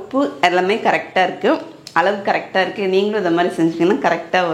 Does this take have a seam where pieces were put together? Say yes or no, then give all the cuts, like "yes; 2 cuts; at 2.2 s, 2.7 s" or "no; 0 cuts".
no; 0 cuts